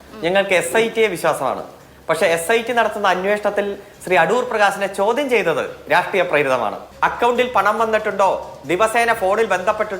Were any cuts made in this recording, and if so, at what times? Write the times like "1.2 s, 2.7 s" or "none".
6.8 s